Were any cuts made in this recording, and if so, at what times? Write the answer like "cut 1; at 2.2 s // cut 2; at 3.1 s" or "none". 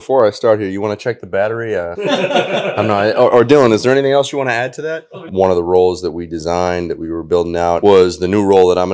cut 1; at 5.3 s